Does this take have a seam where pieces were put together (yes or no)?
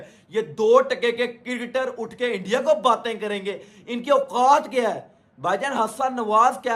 no